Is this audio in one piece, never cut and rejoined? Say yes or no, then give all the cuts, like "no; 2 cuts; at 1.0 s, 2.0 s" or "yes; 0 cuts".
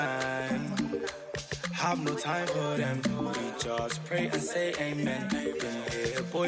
yes; 0 cuts